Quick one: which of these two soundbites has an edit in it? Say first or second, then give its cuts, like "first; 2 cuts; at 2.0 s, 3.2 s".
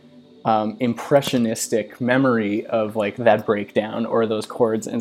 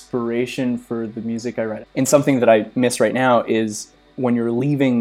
second; 2 cuts; at 1.8 s, 4.0 s